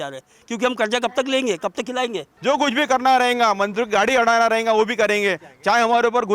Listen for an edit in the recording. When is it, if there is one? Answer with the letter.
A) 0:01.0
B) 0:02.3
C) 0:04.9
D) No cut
B